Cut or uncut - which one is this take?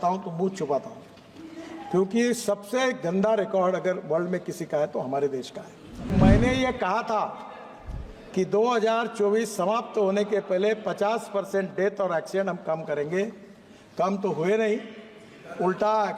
cut